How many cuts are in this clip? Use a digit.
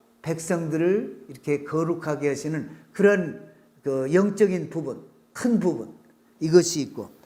0